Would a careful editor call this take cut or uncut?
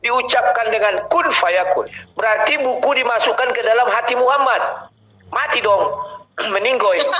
cut